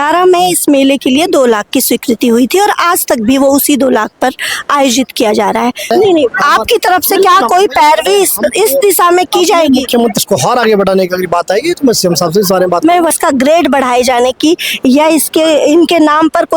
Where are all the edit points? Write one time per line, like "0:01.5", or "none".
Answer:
0:05.9
0:10.2
0:13.1